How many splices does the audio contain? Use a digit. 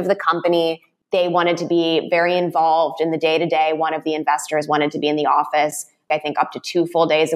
1